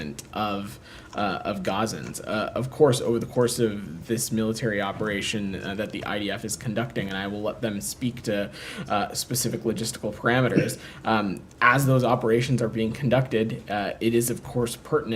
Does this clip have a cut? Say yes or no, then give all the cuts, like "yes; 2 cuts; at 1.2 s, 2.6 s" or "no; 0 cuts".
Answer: no; 0 cuts